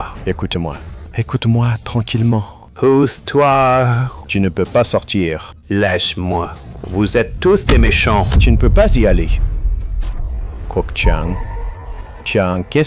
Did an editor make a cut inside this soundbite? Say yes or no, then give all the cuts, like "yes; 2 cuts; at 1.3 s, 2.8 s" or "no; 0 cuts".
no; 0 cuts